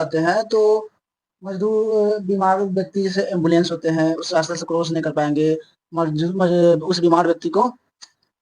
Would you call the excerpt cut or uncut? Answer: uncut